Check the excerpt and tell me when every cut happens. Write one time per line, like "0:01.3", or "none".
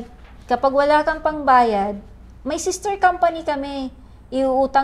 none